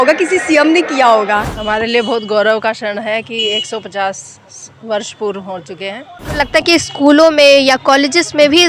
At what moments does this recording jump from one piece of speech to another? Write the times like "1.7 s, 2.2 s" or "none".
1.5 s, 6.3 s